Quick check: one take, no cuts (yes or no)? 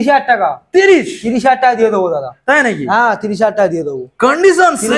yes